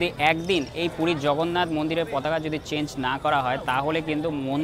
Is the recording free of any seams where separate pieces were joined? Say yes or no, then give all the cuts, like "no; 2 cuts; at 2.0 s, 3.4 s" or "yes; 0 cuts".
yes; 0 cuts